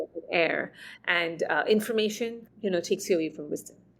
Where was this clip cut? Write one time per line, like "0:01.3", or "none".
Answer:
0:02.4